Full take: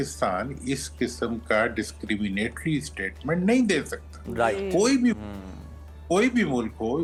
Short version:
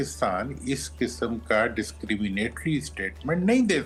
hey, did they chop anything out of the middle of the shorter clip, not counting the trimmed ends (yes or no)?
no